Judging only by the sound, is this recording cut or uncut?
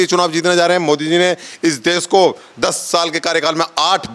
uncut